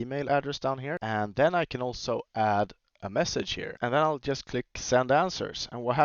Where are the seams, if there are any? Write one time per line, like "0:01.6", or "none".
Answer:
0:01.0
0:03.7